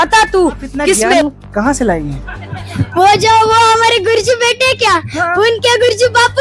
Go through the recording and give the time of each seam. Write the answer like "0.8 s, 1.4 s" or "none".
1.2 s